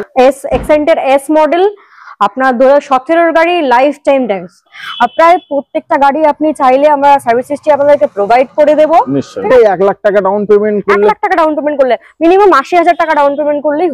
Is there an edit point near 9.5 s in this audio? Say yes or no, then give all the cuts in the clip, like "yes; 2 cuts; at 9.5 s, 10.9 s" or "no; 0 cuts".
yes; 2 cuts; at 4.8 s, 9.5 s